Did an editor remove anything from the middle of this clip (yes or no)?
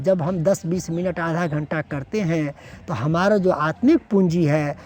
no